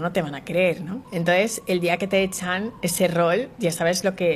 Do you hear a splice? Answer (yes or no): yes